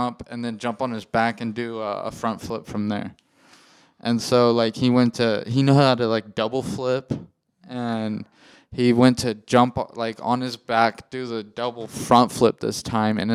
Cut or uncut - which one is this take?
uncut